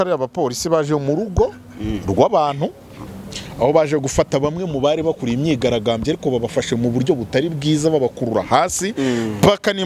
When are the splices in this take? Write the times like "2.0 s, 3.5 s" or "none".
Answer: none

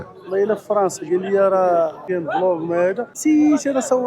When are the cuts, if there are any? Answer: 2.0 s, 3.1 s

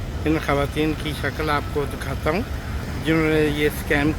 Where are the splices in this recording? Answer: 2.8 s

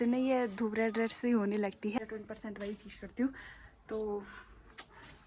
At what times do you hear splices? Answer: 2.0 s

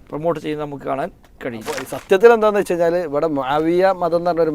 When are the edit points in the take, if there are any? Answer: 1.8 s

